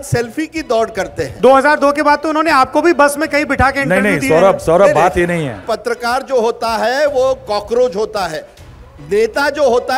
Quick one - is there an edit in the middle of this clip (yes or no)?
yes